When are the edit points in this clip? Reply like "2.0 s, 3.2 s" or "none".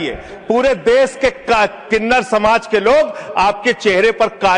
none